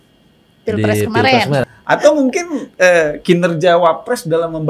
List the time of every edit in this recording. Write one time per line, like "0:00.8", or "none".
0:01.7